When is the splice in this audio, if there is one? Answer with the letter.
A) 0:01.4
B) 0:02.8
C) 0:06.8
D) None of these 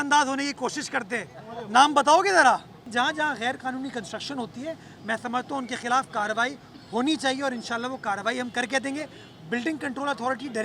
B